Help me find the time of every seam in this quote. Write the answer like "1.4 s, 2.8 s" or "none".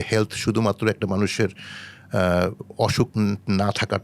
none